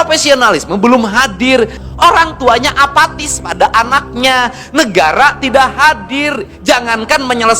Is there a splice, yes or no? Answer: yes